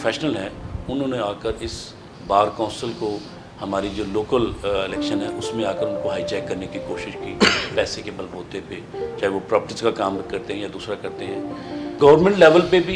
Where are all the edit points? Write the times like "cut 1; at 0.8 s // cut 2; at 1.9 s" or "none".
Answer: cut 1; at 11.8 s